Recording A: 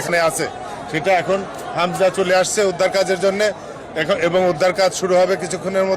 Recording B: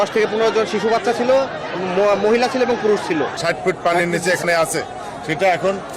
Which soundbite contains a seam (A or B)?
B